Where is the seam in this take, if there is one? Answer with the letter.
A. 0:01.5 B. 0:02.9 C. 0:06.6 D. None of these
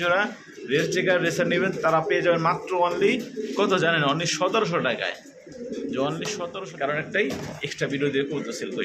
C